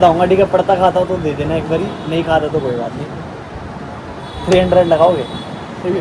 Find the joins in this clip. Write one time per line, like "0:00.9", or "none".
none